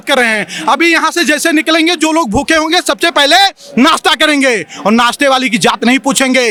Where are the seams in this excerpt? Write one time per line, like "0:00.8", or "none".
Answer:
none